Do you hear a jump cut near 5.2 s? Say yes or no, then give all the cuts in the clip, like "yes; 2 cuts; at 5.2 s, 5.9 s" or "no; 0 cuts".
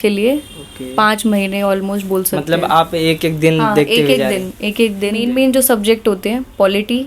yes; 1 cut; at 5.2 s